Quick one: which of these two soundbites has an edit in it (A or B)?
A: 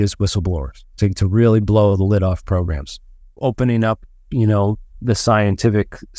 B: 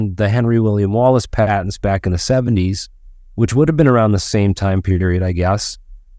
A